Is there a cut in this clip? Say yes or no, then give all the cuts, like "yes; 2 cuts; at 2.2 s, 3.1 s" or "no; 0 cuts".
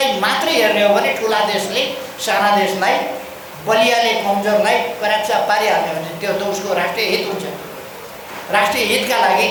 no; 0 cuts